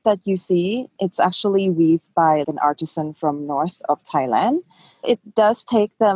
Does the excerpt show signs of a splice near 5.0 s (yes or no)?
no